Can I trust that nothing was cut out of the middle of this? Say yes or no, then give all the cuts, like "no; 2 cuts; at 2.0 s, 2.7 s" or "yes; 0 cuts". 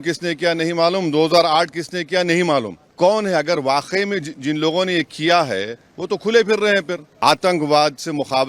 no; 2 cuts; at 2.8 s, 7.1 s